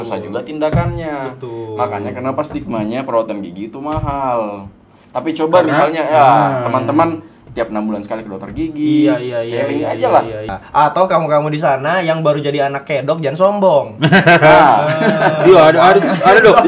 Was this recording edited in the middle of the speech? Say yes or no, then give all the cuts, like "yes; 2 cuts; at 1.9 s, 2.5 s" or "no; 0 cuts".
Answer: yes; 1 cut; at 10.5 s